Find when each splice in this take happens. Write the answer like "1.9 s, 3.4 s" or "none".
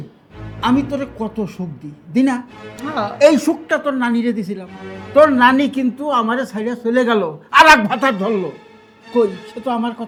none